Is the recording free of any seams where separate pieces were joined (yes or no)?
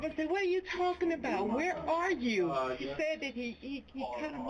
no